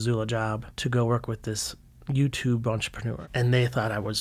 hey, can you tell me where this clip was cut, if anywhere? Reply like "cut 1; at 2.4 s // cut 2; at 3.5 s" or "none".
cut 1; at 3.1 s